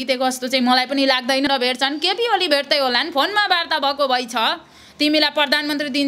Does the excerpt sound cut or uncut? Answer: cut